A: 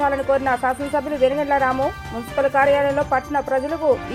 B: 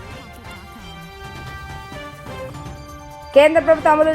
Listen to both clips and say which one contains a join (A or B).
B